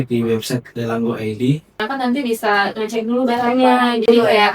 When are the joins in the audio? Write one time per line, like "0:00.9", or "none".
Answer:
0:01.9